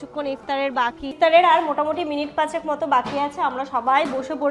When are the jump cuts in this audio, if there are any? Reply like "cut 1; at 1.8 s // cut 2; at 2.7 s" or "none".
cut 1; at 1.0 s